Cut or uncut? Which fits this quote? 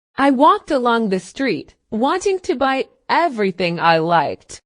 cut